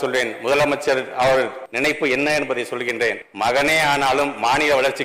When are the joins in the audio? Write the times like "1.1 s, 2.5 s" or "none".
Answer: 1.6 s, 3.2 s